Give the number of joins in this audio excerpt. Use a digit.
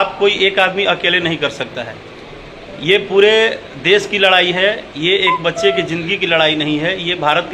0